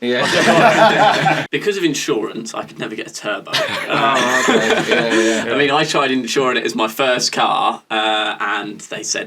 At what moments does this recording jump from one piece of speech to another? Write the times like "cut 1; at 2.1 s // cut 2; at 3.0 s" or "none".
cut 1; at 1.4 s